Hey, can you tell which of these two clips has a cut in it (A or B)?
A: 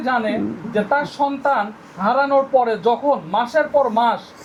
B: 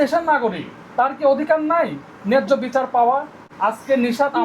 B